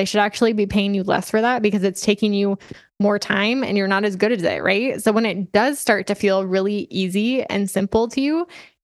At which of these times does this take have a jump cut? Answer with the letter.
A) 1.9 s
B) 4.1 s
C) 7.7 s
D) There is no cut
D